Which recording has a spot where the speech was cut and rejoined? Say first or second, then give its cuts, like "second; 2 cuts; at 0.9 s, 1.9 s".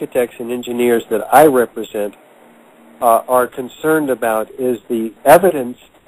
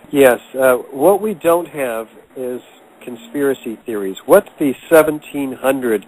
first; 1 cut; at 4.7 s